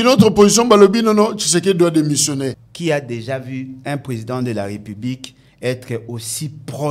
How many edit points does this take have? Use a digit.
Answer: 2